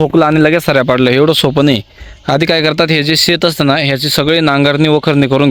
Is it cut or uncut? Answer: uncut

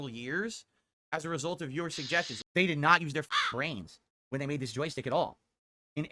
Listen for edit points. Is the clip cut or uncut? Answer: cut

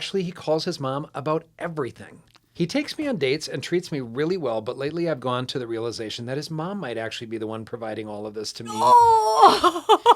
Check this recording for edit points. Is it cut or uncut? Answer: cut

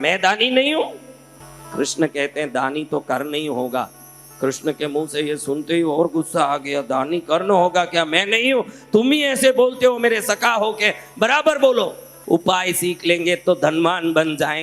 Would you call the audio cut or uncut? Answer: cut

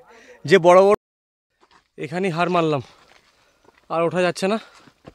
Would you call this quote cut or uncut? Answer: cut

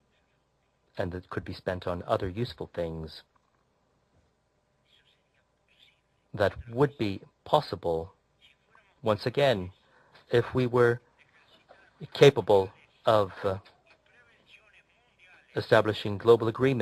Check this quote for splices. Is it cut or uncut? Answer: uncut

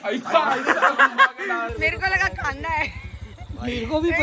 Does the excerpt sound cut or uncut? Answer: cut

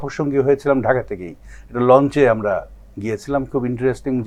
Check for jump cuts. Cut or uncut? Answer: uncut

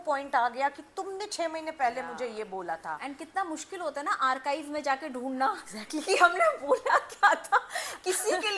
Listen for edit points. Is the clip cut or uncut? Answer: uncut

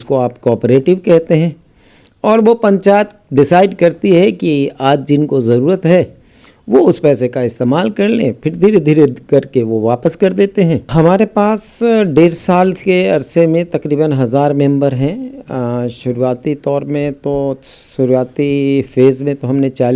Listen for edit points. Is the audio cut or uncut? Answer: cut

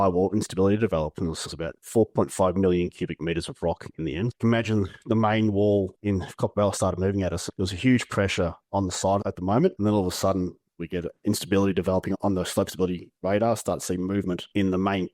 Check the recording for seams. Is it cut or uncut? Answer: cut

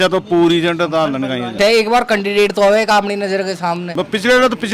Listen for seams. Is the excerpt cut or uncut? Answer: cut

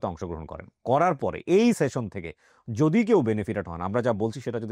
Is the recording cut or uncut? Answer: uncut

